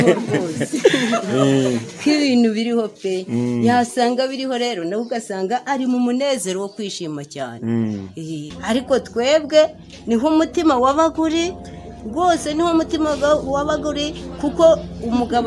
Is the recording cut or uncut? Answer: cut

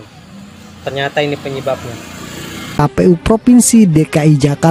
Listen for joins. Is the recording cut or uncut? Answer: cut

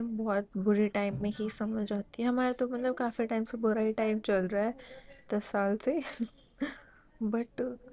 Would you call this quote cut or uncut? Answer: uncut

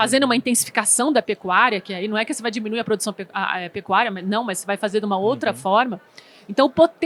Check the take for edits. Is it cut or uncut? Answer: uncut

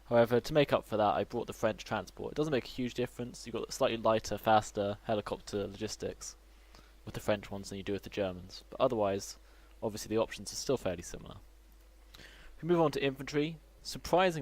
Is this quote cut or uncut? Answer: cut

